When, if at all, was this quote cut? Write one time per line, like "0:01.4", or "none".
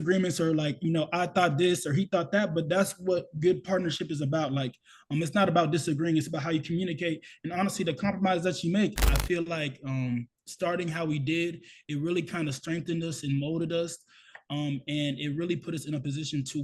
0:08.9